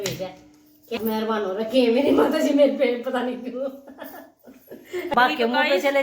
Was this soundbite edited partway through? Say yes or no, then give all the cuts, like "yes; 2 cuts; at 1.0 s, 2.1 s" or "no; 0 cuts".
yes; 2 cuts; at 1.0 s, 5.1 s